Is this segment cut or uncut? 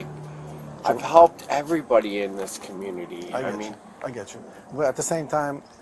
uncut